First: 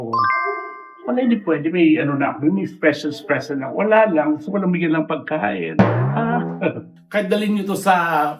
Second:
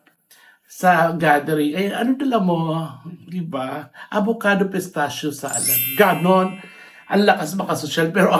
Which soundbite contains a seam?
first; 1 cut; at 6.9 s

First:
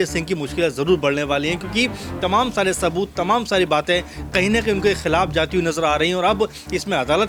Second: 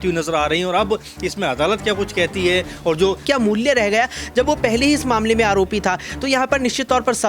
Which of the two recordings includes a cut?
second; 1 cut; at 3.2 s

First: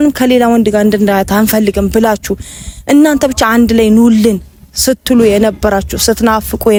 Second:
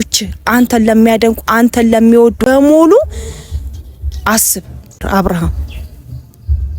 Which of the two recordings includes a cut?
second; 2 cuts; at 2.4 s, 5.1 s

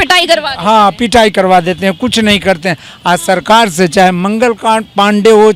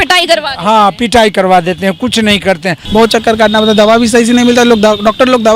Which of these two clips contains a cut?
second; 1 cut; at 2.8 s

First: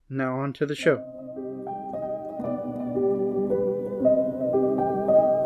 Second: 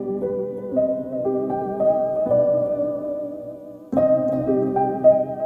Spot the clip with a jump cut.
first; 1 cut; at 1.1 s

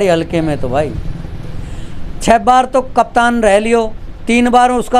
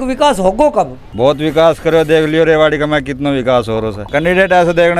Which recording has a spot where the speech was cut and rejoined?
second; 2 cuts; at 1.0 s, 4.0 s

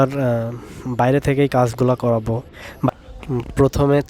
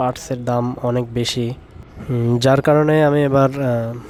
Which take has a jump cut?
first; 1 cut; at 2.9 s

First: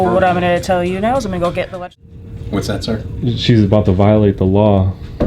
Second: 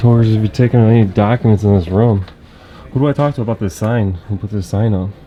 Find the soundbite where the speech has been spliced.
first; 1 cut; at 1.7 s

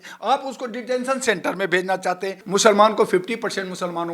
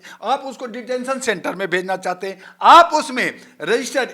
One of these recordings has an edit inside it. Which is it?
first; 1 cut; at 2.4 s

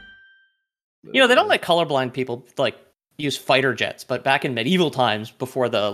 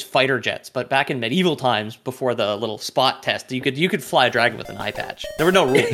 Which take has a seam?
first; 1 cut; at 1.0 s

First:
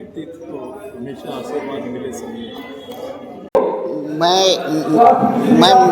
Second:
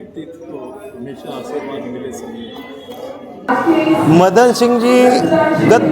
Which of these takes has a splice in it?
second; 1 cut; at 3.4 s

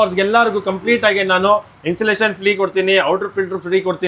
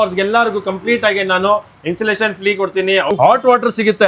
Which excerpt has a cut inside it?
second; 1 cut; at 3.1 s

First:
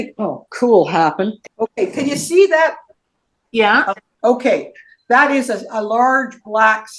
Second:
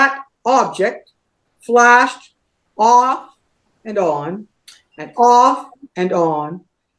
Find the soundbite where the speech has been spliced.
first; 3 cuts; at 1.4 s, 2.9 s, 4.1 s

